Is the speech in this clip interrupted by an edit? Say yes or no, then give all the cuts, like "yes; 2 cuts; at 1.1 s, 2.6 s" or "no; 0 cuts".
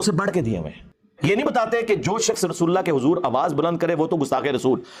yes; 1 cut; at 1.0 s